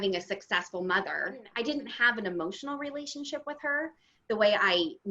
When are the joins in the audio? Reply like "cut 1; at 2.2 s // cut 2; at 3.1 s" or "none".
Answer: cut 1; at 1.4 s